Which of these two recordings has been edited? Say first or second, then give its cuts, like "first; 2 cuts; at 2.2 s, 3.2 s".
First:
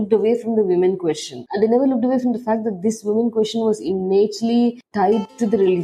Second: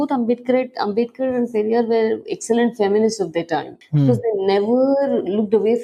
first; 2 cuts; at 1.4 s, 4.8 s